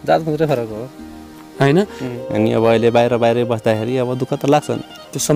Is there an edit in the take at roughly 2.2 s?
yes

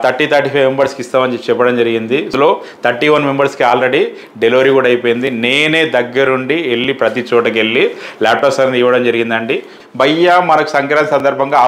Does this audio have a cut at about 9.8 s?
yes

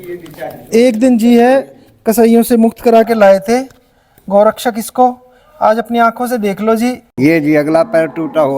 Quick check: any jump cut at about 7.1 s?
yes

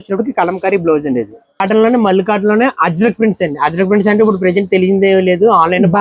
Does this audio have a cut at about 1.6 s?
yes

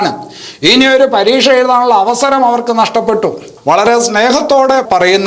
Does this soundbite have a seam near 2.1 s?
no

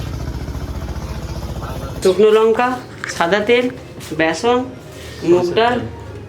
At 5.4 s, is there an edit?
no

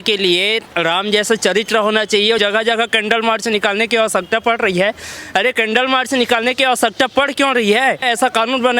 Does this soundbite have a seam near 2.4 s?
yes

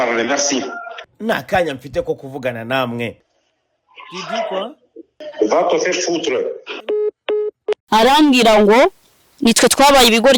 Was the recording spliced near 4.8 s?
no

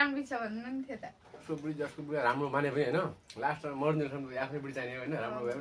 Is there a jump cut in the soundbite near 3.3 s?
no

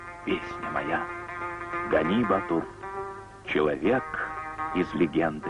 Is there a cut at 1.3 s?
yes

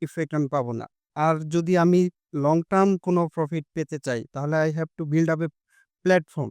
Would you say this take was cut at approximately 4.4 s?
no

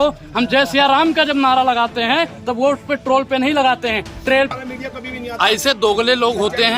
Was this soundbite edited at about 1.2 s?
no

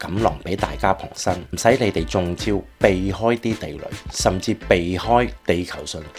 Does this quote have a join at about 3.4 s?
no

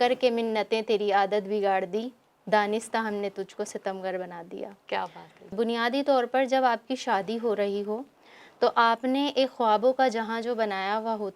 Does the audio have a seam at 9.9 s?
no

